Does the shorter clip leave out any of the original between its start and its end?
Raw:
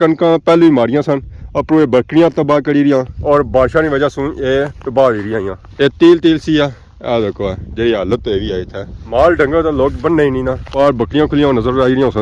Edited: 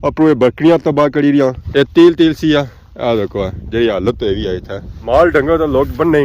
yes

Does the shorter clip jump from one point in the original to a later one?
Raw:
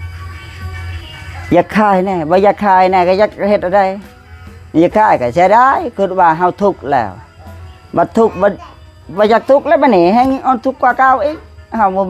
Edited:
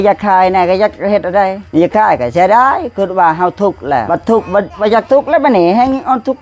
yes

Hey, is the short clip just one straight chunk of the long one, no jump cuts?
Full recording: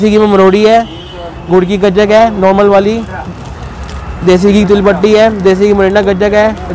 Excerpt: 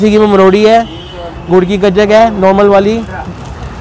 yes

